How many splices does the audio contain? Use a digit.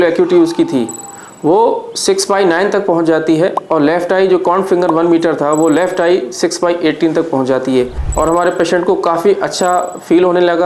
1